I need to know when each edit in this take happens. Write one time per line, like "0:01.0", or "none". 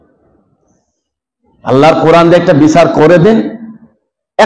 none